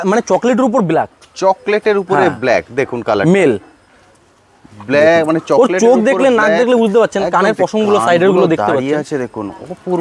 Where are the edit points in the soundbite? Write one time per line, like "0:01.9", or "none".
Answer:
none